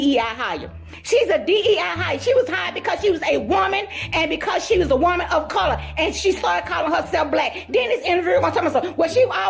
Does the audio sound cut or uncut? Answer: uncut